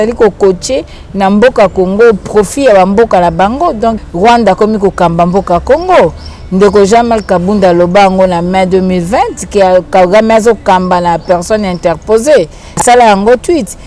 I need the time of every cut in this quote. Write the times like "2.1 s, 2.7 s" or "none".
4.0 s